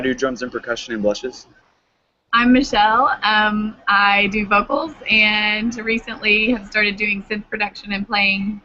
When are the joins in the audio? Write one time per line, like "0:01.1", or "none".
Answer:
0:01.6